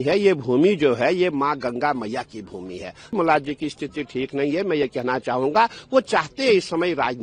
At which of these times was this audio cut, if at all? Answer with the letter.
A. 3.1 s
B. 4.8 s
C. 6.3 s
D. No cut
A